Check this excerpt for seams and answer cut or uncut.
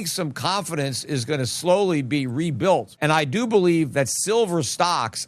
uncut